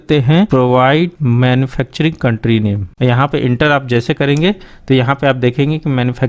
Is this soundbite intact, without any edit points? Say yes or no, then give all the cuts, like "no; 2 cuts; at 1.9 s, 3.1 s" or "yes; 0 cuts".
no; 2 cuts; at 1.2 s, 2.9 s